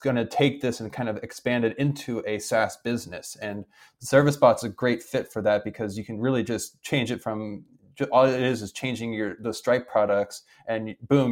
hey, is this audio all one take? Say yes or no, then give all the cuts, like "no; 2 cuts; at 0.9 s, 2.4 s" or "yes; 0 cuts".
yes; 0 cuts